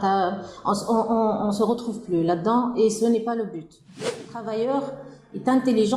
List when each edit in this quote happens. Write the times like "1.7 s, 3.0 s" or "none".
4.2 s